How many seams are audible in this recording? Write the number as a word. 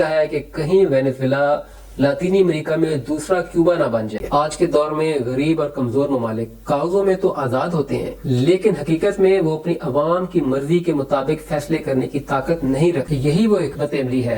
two